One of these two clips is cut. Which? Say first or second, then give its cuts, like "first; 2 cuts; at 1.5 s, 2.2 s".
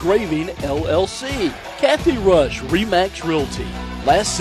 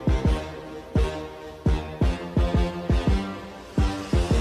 first; 1 cut; at 1.7 s